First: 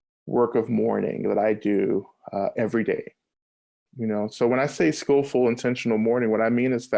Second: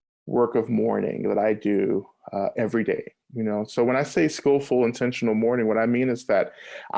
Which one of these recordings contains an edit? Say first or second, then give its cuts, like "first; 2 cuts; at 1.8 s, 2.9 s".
second; 1 cut; at 3.2 s